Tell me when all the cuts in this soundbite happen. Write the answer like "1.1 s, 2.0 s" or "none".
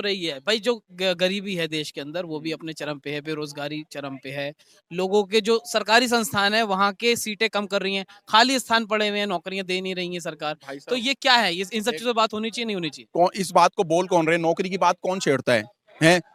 none